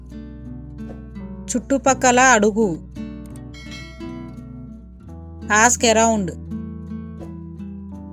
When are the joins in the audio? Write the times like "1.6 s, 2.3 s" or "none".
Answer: 1.5 s, 2.8 s, 5.5 s, 6.9 s

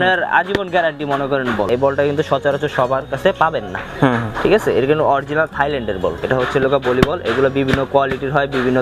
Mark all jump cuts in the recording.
1.7 s, 6.2 s

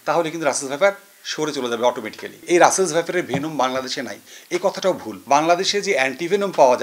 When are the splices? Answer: 2.4 s, 5.1 s

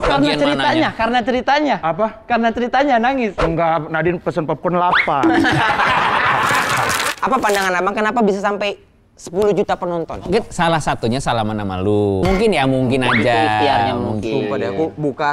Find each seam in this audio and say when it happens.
7.1 s

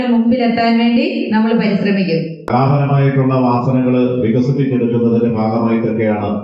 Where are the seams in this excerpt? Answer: 2.4 s

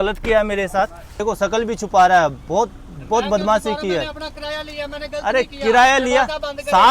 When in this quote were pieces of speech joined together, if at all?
1.1 s

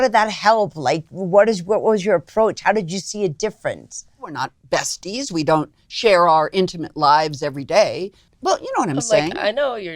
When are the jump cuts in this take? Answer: 4.2 s, 8.2 s

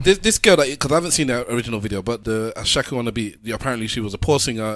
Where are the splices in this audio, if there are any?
2.2 s

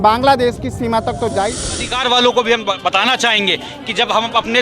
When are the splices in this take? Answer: 1.8 s

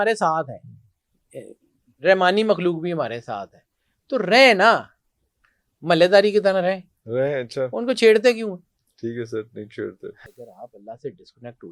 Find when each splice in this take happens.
10.3 s

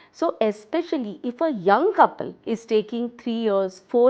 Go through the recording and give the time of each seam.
2.3 s

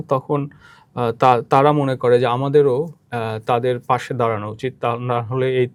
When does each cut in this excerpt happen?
none

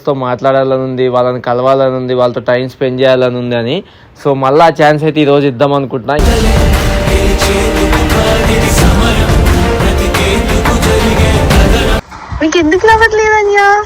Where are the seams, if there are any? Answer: 12.0 s

